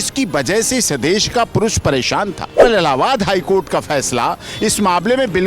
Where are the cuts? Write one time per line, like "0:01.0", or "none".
0:02.6